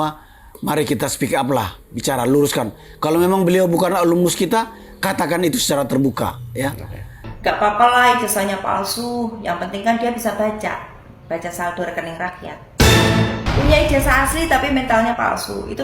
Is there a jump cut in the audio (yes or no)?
yes